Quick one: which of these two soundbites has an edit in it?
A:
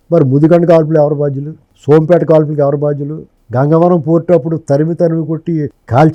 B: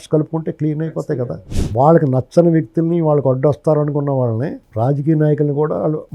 B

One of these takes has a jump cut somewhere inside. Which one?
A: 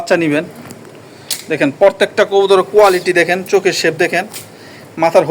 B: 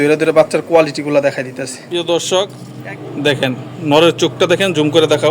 B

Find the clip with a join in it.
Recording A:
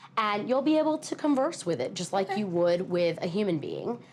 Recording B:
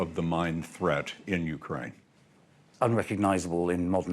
B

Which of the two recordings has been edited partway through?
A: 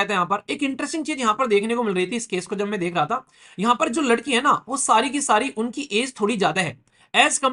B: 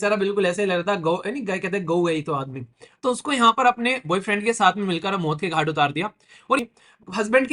B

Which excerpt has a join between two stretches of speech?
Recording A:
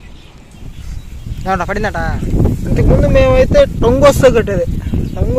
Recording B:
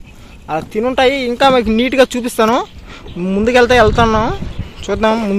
A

